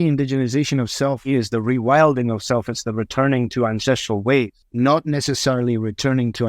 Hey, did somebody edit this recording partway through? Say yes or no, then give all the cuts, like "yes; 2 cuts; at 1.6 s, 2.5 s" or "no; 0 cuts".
yes; 2 cuts; at 1.3 s, 4.6 s